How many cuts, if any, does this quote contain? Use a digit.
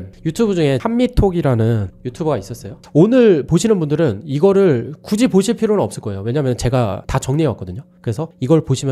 2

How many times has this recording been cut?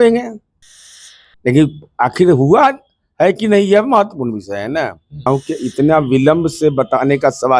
1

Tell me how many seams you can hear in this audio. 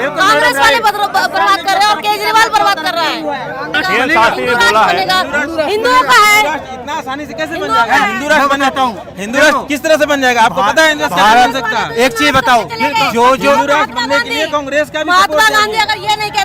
1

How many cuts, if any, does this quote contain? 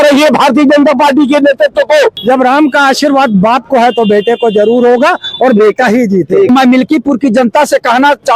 2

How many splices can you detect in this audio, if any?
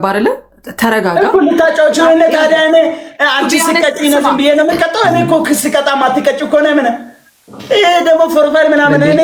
0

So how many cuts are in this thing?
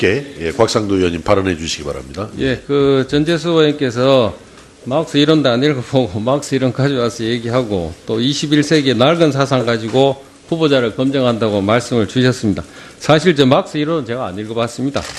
0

